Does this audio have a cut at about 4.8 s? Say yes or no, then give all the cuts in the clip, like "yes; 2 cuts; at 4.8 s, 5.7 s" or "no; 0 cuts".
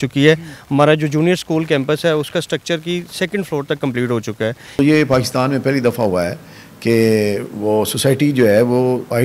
yes; 1 cut; at 4.8 s